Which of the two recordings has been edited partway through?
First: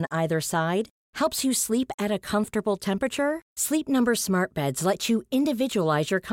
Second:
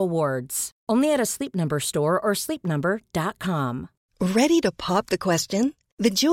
second; 1 cut; at 4.0 s

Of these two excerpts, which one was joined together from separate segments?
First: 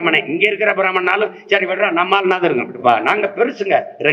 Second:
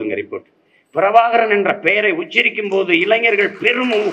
first; 1 cut; at 2.7 s

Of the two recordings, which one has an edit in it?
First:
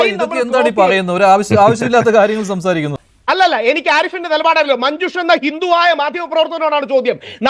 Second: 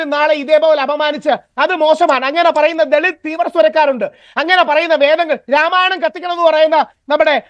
first; 1 cut; at 3.1 s

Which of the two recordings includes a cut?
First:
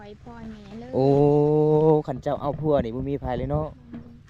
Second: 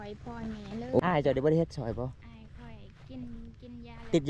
second; 1 cut; at 1.0 s

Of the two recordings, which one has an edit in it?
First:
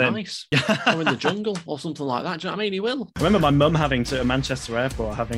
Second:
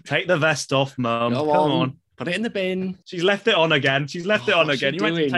first; 1 cut; at 3.1 s

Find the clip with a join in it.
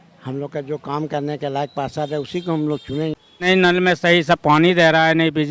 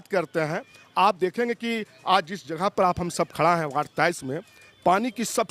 first; 1 cut; at 3.5 s

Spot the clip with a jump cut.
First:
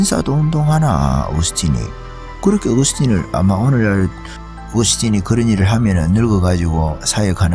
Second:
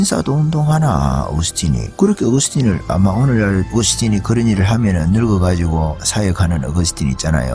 second; 2 cuts; at 1.9 s, 3.7 s

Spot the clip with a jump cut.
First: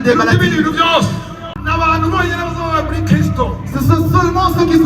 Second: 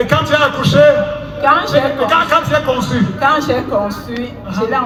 first; 1 cut; at 1.6 s

